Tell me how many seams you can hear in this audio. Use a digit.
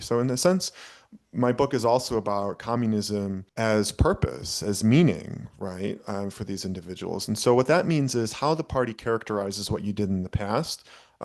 1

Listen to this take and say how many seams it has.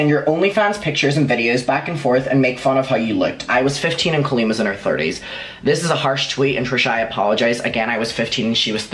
0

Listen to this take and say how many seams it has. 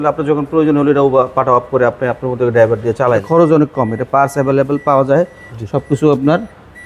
1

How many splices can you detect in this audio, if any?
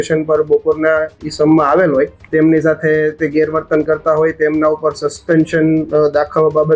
1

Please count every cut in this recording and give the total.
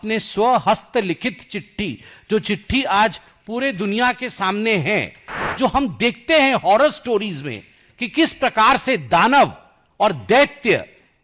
1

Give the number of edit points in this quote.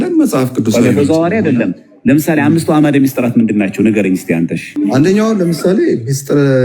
1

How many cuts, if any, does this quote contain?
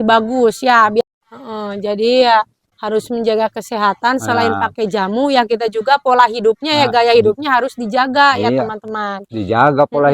1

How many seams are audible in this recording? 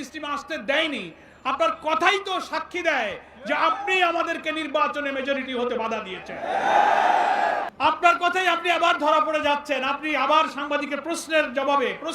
1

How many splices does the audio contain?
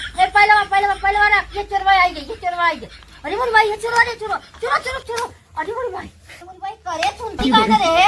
0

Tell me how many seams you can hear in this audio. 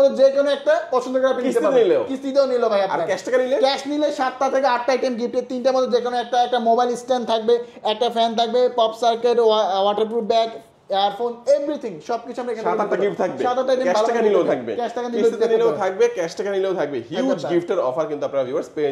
0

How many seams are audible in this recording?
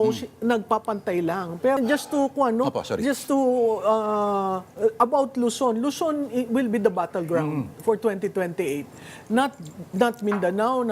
1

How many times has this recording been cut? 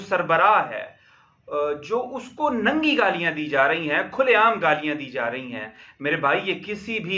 0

